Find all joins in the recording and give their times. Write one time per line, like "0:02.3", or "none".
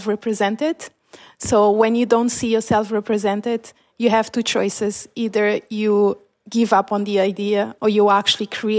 0:07.7